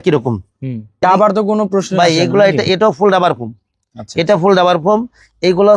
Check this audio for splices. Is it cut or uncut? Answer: cut